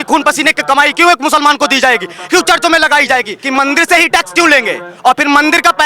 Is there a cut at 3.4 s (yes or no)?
yes